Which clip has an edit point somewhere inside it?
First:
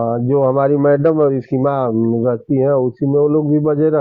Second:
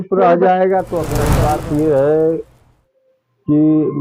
second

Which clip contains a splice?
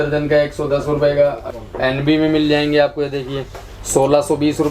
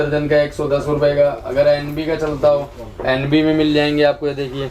first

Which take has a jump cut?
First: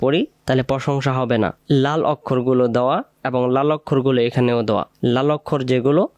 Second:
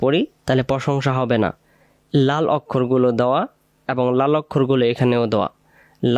first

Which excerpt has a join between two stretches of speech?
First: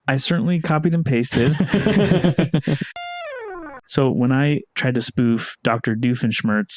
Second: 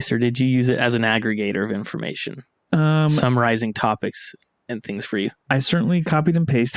first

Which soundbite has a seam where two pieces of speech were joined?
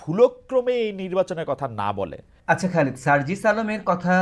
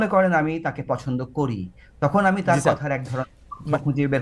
first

